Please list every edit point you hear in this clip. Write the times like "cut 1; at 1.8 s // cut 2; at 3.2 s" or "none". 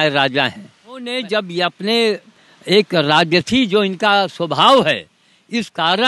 cut 1; at 1.1 s